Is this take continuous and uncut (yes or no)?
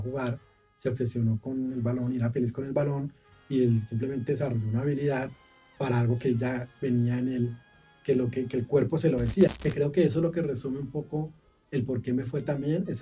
no